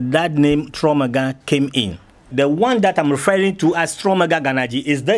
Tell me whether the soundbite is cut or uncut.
cut